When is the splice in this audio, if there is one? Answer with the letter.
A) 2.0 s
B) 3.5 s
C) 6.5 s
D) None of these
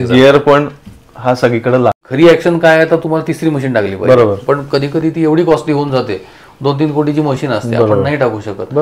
A